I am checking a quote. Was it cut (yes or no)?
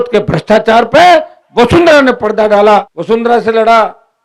yes